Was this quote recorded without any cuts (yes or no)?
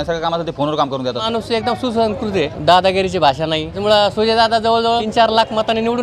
no